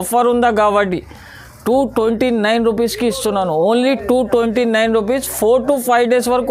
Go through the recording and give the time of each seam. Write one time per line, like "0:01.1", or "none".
none

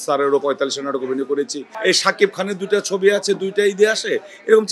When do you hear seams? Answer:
0:01.7

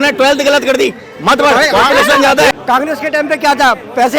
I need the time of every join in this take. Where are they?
0:02.6

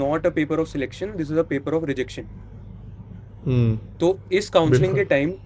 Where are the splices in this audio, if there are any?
none

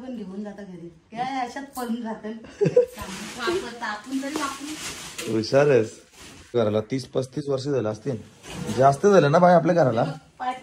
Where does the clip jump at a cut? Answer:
0:06.5

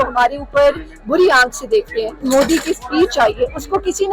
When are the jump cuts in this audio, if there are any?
0:02.2

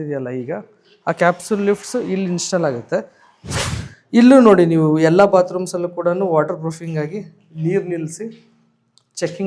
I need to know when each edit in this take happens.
0:03.5

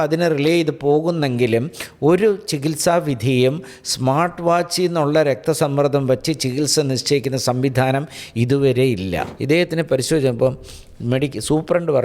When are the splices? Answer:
0:09.3

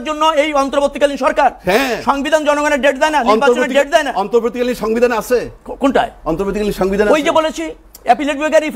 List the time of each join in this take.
none

